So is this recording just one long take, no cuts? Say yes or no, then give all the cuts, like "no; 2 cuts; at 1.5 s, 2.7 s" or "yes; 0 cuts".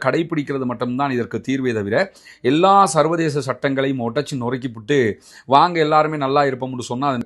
yes; 0 cuts